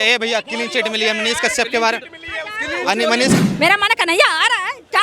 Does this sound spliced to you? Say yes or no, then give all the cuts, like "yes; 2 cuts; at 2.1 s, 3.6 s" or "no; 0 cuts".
yes; 1 cut; at 3.3 s